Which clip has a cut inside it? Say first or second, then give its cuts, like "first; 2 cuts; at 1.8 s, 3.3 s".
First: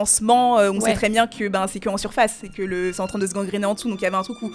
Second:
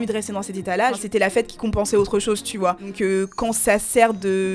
second; 2 cuts; at 1.0 s, 2.9 s